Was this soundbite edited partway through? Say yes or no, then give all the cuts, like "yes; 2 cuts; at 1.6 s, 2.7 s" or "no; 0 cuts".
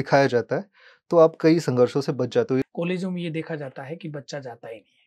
yes; 1 cut; at 2.6 s